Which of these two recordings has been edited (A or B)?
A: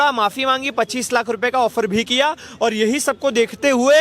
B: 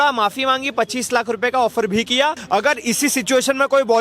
B